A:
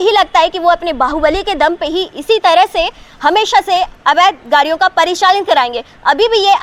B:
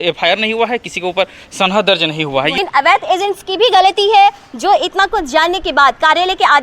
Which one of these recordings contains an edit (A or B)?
B